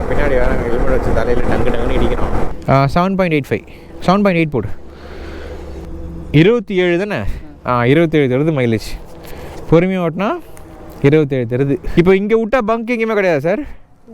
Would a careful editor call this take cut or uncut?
cut